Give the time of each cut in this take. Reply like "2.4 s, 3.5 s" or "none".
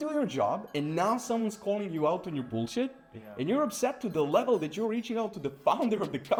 none